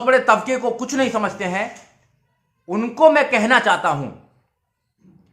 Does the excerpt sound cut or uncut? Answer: uncut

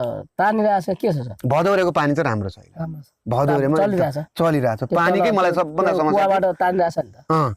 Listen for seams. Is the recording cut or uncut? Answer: uncut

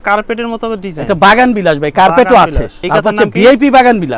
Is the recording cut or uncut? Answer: cut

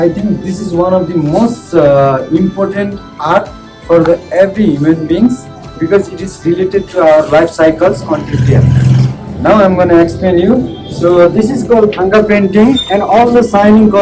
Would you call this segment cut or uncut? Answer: uncut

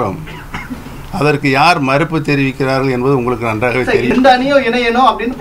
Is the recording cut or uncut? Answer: cut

